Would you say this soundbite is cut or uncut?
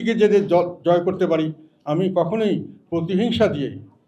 uncut